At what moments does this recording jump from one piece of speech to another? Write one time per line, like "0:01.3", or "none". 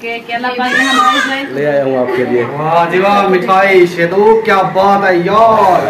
0:01.5